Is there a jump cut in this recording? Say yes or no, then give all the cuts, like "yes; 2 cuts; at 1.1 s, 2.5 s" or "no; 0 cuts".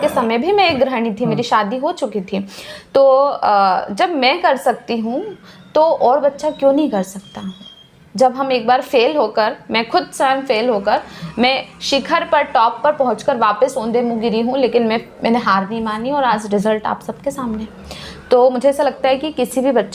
no; 0 cuts